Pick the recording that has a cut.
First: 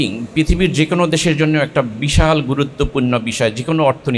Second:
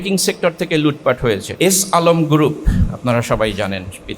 second; 1 cut; at 1.5 s

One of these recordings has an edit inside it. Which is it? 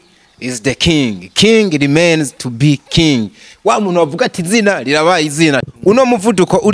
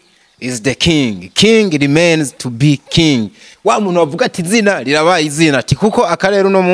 first; 1 cut; at 5.7 s

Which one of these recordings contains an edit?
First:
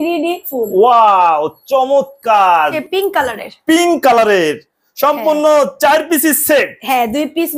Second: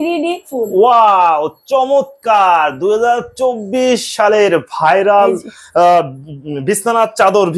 first; 1 cut; at 2.7 s

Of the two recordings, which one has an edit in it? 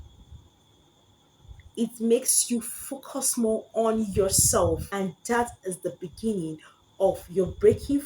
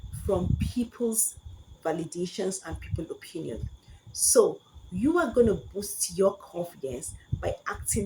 first; 1 cut; at 4.9 s

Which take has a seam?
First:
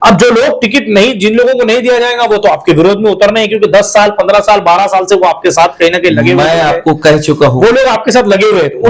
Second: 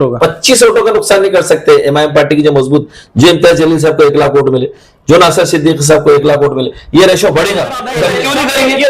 second; 1 cut; at 7.9 s

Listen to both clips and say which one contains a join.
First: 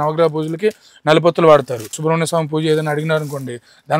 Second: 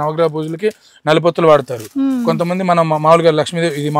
first; 1 cut; at 1.9 s

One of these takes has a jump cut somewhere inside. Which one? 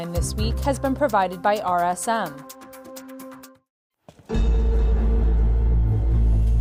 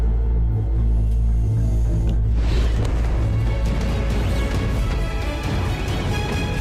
first; 2 cuts; at 2.4 s, 3.4 s

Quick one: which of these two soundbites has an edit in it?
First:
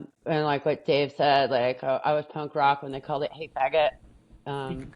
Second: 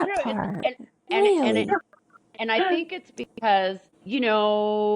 second; 1 cut; at 3.9 s

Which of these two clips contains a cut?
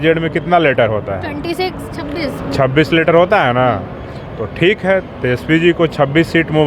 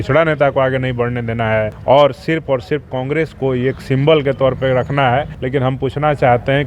second; 2 cuts; at 1.7 s, 5.4 s

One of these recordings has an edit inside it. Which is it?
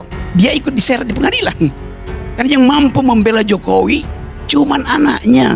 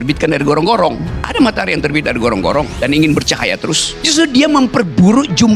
second; 3 cuts; at 1.2 s, 2.7 s, 3.9 s

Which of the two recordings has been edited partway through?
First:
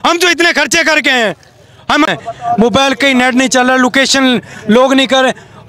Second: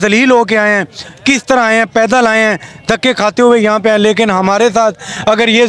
first; 1 cut; at 2.2 s

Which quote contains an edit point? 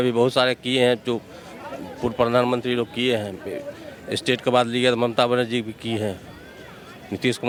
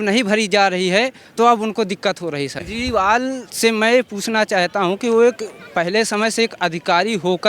second; 1 cut; at 2.6 s

